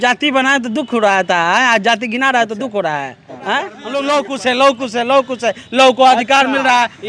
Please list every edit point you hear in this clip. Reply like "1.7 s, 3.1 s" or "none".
3.8 s

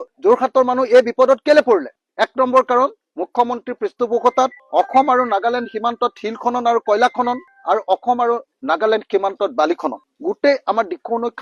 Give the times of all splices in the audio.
none

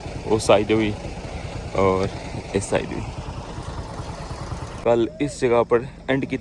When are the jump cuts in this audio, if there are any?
4.8 s

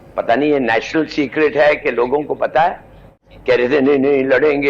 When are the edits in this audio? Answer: 3.2 s

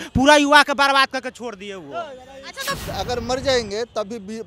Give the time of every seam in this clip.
2.8 s

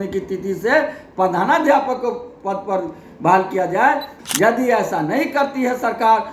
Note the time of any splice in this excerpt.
4.1 s

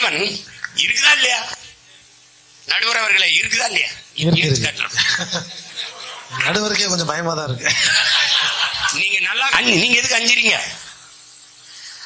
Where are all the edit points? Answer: 9.5 s

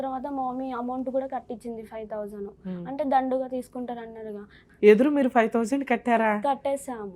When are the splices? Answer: 4.6 s

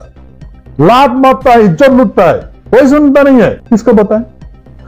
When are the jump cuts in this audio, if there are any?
2.5 s, 3.6 s

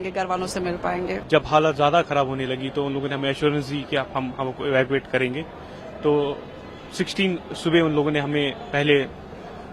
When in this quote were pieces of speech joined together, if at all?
1.2 s

